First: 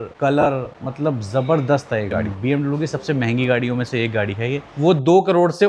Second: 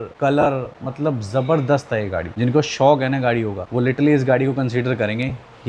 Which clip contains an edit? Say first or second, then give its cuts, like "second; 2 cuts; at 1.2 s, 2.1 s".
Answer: first; 2 cuts; at 2.2 s, 4.7 s